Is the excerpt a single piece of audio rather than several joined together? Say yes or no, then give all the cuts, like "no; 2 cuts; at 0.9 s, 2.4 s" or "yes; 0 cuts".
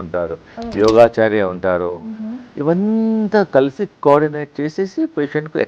yes; 0 cuts